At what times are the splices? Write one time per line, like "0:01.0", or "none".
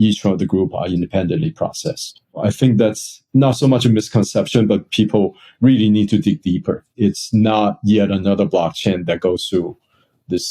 0:02.4
0:06.9